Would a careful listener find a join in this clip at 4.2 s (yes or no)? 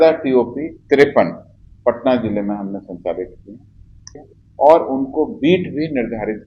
yes